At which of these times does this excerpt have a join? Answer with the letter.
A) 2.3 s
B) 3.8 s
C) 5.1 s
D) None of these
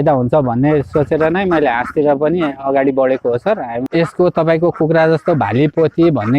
B